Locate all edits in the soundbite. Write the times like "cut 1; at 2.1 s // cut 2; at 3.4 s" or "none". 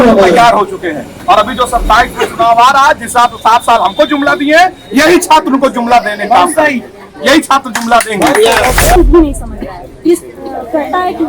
cut 1; at 9.0 s